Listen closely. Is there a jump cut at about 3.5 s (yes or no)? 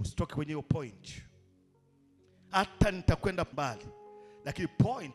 yes